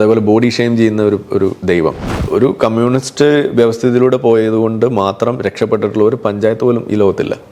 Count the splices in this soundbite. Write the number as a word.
one